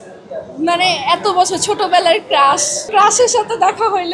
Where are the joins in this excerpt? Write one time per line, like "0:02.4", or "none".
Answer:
0:02.9